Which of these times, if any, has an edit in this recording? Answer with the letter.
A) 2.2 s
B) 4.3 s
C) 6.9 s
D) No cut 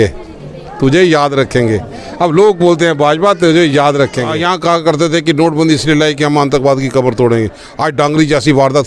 B